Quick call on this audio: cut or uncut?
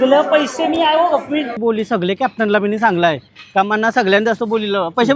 cut